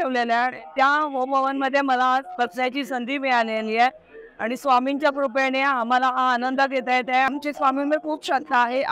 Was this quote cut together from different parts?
yes; 1 cut; at 7.3 s

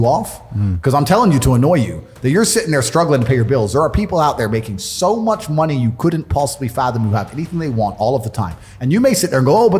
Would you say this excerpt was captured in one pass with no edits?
yes; 0 cuts

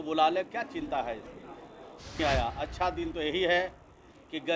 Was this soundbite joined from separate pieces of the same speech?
yes; 1 cut; at 2.2 s

